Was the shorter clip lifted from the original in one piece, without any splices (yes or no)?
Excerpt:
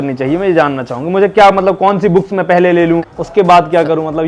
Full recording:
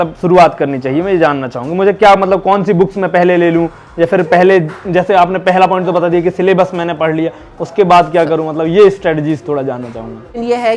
no